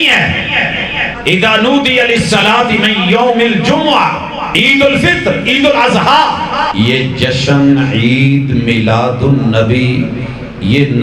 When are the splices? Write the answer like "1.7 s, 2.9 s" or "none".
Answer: 1.1 s, 4.5 s, 6.7 s